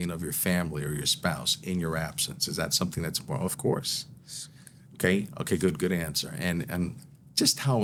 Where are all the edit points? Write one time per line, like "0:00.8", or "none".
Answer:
none